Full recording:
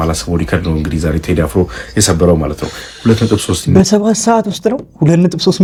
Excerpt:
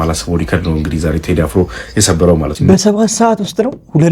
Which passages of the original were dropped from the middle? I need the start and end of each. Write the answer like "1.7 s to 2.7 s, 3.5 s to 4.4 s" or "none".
2.5 s to 3.6 s